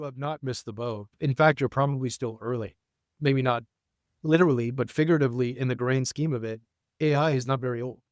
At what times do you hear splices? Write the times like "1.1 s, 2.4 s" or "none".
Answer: 1.1 s, 3.1 s